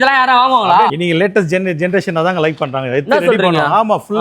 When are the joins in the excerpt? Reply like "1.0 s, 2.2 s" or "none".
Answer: none